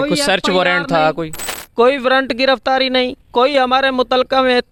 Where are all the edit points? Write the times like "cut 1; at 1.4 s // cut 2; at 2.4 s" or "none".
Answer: none